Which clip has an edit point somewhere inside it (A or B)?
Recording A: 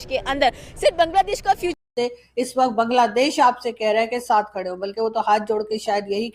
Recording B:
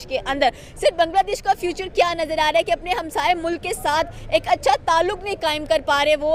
A